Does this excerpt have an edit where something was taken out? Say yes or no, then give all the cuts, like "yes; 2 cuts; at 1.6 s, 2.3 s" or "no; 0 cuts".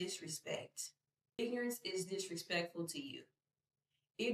yes; 1 cut; at 1.4 s